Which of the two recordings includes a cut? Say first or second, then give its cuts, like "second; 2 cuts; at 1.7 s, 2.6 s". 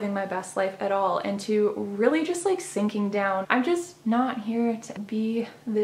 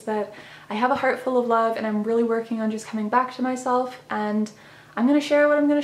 first; 2 cuts; at 3.4 s, 4.9 s